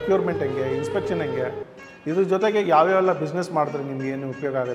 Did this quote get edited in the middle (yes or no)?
no